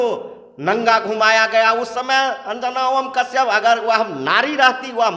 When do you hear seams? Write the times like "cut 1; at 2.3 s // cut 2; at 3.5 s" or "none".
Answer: none